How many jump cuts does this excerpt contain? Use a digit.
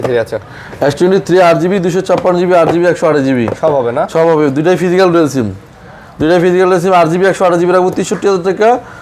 0